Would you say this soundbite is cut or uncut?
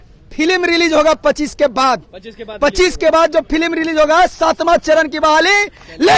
uncut